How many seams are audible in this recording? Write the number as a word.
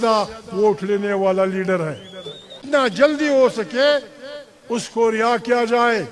one